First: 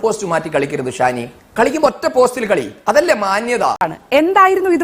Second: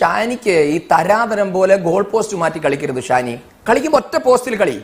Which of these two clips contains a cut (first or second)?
first